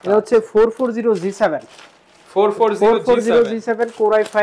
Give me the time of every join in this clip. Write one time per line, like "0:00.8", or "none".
none